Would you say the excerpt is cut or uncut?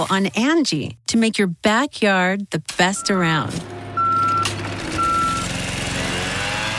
uncut